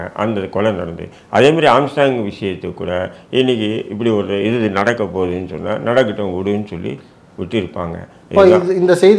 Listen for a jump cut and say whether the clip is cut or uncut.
uncut